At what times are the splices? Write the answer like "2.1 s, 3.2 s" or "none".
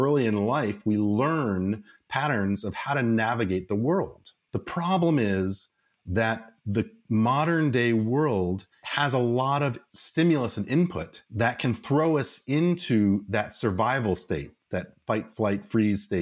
none